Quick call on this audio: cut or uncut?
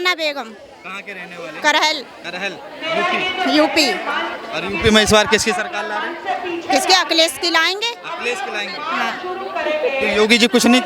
uncut